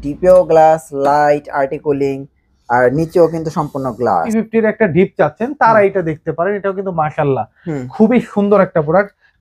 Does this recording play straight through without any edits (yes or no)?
no